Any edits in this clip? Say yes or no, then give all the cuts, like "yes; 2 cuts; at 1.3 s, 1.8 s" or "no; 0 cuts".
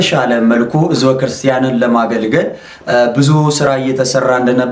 no; 0 cuts